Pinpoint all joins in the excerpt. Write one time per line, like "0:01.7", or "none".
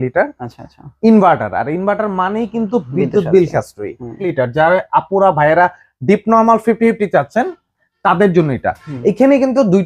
0:04.2